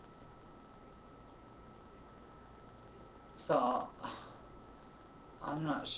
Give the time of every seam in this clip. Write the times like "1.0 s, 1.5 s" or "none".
3.1 s

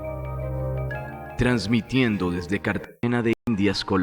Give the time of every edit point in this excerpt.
none

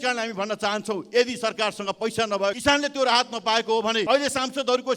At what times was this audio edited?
2.6 s, 4.0 s

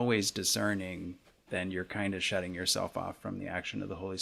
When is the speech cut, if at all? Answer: none

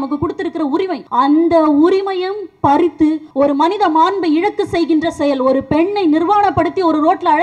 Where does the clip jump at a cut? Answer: 1.0 s, 3.2 s

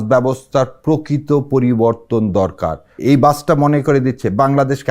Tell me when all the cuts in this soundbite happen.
2.8 s

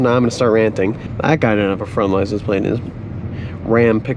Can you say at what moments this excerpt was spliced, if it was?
1.1 s

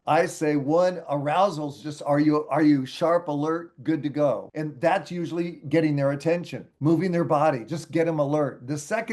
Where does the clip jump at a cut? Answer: 4.5 s

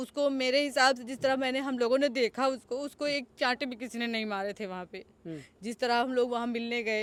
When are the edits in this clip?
none

